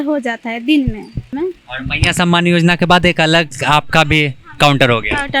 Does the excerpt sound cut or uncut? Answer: cut